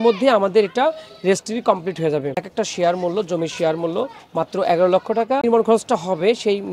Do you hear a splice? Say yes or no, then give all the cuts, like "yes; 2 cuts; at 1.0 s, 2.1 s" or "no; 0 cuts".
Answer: yes; 2 cuts; at 2.4 s, 5.4 s